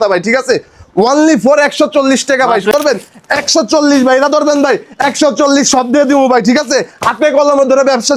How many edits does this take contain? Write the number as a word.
one